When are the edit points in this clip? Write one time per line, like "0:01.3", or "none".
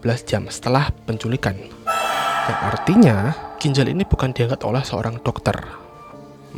none